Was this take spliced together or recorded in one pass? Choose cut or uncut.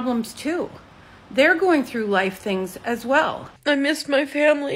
cut